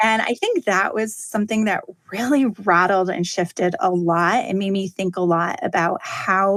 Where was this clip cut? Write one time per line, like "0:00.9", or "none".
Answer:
none

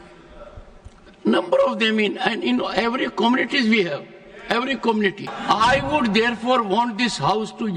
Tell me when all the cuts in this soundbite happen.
0:05.3

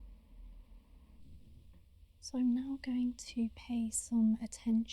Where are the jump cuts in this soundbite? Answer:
0:01.2

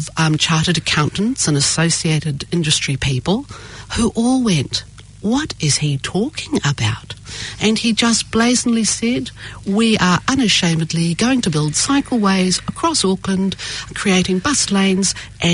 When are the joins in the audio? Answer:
0:13.9

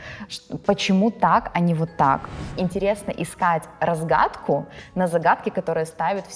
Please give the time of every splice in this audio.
0:02.5

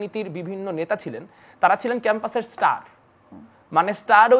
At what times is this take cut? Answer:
none

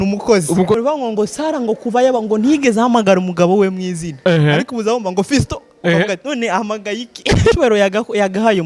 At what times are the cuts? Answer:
0:00.7
0:07.6

